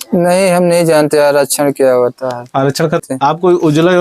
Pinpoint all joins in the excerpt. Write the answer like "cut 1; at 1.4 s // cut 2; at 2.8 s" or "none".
cut 1; at 3.0 s